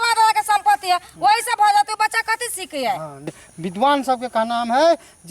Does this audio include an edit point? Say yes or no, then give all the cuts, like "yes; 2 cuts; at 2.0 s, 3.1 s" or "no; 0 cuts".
yes; 1 cut; at 3.5 s